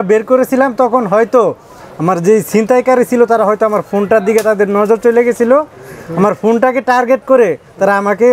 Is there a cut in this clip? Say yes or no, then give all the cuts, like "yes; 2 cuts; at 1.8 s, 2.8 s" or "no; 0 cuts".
no; 0 cuts